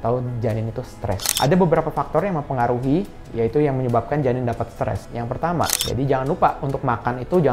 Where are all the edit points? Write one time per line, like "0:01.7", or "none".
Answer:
0:01.3
0:05.8